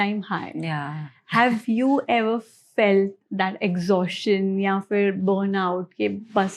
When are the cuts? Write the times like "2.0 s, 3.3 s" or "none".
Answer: none